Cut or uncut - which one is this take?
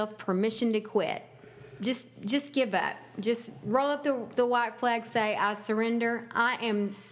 uncut